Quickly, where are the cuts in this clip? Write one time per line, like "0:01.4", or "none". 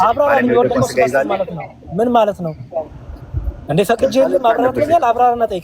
none